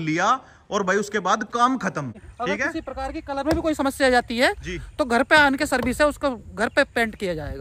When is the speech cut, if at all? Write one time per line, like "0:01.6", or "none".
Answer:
0:02.3